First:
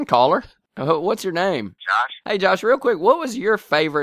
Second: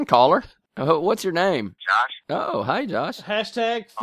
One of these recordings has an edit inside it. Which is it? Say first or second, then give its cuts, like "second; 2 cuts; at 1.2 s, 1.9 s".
first; 1 cut; at 2.2 s